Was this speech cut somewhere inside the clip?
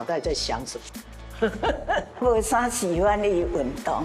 yes; 1 cut; at 2.2 s

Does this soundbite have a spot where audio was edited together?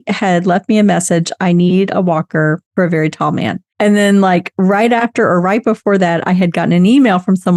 yes; 2 cuts; at 2.6 s, 3.6 s

